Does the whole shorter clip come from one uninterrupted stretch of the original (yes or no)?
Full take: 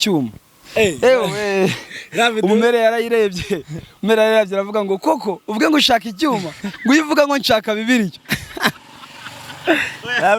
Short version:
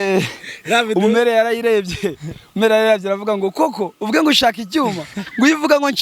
yes